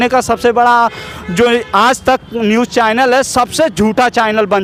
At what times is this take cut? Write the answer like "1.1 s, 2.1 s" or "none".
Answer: none

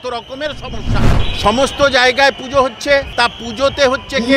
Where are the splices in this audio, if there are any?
1.2 s, 3.1 s

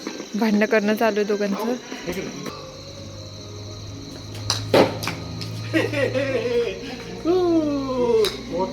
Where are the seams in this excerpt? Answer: 2.5 s

